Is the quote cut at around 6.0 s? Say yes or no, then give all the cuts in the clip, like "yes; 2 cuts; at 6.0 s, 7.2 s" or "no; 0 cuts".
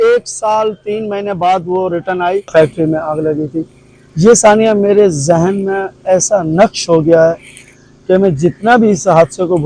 no; 1 cut; at 2.5 s